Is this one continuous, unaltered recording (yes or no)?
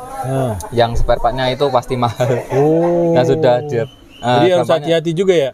yes